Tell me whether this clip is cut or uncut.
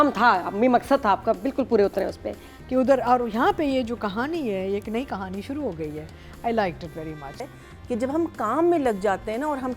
cut